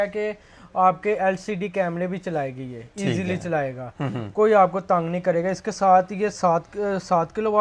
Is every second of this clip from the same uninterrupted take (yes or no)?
yes